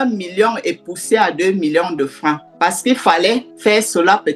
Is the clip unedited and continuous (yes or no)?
no